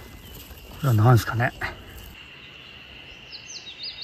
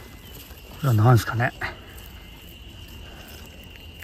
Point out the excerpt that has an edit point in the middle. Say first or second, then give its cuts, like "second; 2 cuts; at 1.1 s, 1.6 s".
first; 1 cut; at 2.1 s